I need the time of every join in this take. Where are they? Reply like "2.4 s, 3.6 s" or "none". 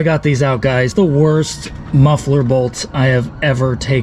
0.9 s